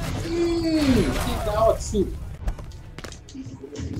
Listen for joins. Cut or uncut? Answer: cut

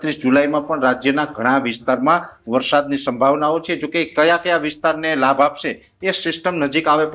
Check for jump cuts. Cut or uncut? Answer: uncut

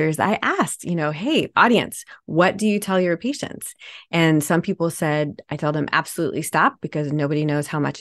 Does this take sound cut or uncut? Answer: uncut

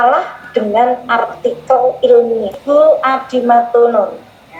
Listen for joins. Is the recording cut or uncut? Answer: cut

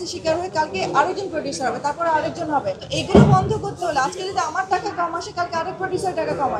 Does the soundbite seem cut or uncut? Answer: cut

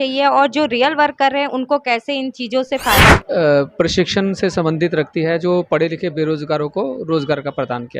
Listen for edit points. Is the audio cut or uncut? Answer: cut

